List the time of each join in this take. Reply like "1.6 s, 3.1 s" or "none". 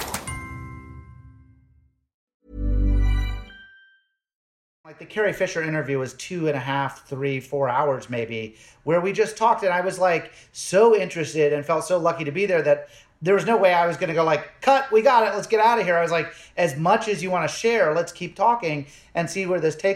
2.3 s, 4.6 s

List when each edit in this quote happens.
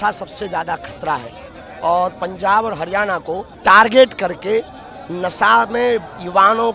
none

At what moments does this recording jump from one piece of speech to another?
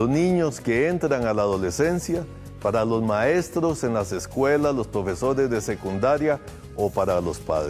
none

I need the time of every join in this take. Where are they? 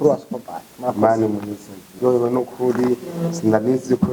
2.0 s

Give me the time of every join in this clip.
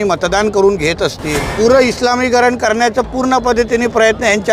1.4 s

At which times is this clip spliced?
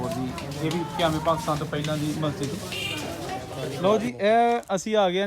3.6 s

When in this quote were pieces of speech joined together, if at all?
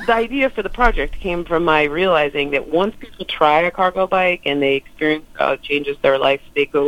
none

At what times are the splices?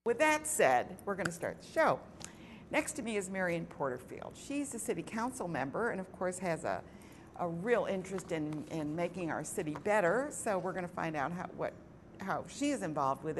none

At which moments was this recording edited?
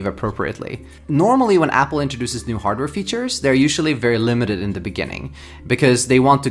1.0 s

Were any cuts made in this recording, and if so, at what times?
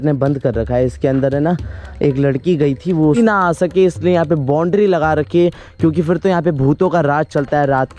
3.2 s

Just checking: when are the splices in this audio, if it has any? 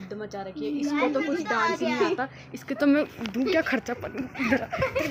none

